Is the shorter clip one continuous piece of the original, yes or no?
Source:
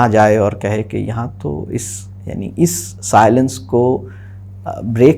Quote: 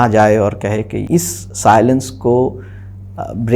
no